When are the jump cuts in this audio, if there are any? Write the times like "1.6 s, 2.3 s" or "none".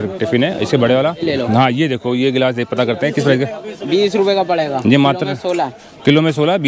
1.3 s